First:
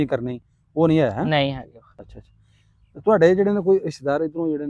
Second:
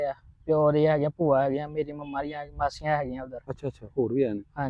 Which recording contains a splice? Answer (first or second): first